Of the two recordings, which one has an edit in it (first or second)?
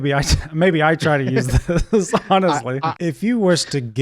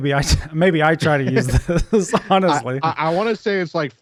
first